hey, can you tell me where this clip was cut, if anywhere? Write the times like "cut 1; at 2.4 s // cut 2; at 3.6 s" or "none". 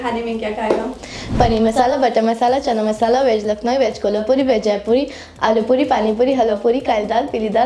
none